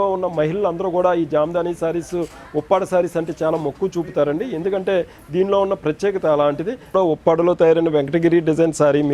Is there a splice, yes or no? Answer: yes